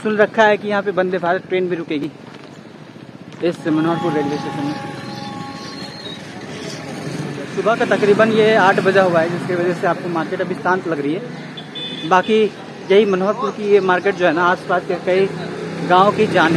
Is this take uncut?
yes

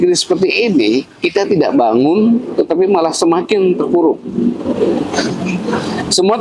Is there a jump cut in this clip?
no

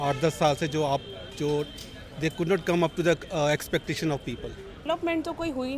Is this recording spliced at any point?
yes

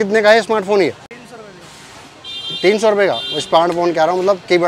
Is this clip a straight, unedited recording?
yes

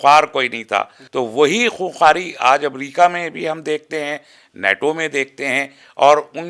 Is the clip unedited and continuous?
no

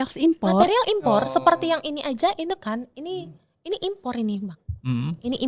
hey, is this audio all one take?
yes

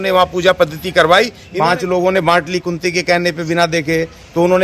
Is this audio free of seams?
no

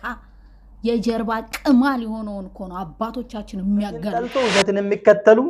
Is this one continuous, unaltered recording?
no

